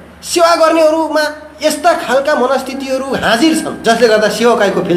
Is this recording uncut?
no; 1 cut; at 3.7 s

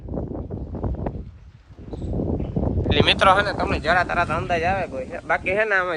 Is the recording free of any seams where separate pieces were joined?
yes; 0 cuts

